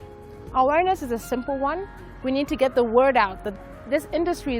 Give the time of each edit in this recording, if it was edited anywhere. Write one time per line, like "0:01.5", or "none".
0:03.4